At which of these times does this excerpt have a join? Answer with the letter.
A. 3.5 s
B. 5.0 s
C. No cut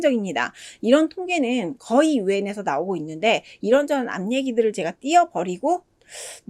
C